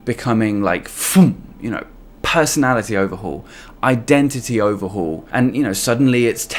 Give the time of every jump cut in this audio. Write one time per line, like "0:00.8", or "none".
0:05.2